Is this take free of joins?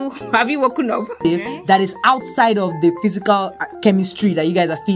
no; 1 cut; at 1.1 s

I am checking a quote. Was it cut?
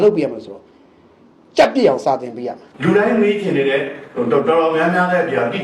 yes; 1 cut; at 2.6 s

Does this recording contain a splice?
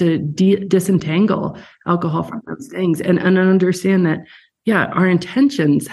no; 0 cuts

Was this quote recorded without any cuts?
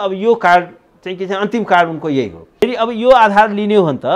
no; 1 cut; at 2.6 s

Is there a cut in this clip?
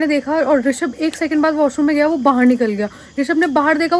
no; 0 cuts

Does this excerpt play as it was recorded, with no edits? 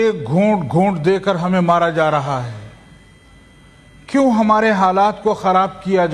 yes; 0 cuts

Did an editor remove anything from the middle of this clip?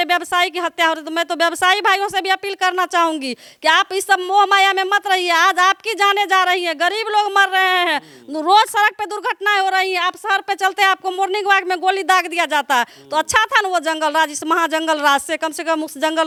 no; 0 cuts

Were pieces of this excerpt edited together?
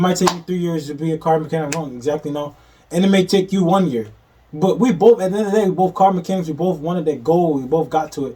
no; 0 cuts

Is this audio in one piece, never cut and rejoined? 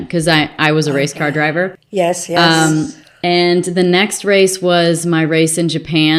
yes; 0 cuts

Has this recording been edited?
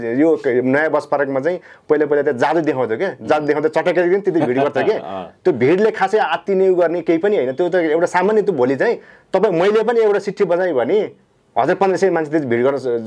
no; 0 cuts

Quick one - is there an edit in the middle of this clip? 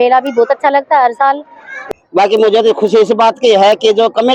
yes; 1 cut; at 1.7 s

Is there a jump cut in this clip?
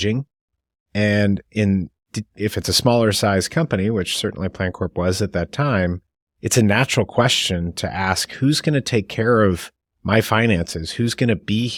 no; 0 cuts

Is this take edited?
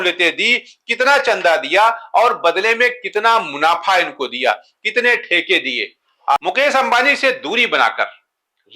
yes; 1 cut; at 6.4 s

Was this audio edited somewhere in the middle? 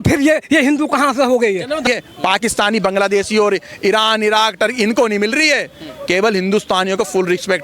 yes; 1 cut; at 1.9 s

